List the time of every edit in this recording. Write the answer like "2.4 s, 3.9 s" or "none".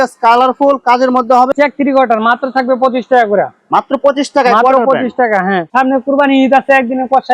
1.5 s, 5.7 s